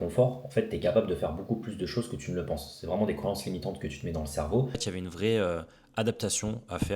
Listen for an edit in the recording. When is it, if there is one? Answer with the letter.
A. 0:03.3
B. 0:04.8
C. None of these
B